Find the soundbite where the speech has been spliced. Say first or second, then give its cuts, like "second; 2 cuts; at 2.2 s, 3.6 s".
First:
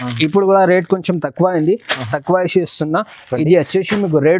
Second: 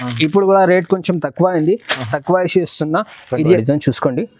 second; 1 cut; at 3.4 s